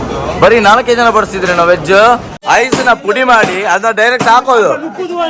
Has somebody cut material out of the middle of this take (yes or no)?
yes